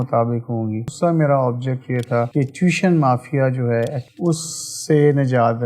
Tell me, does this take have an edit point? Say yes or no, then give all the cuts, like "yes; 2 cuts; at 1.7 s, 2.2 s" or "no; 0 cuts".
yes; 2 cuts; at 0.9 s, 4.0 s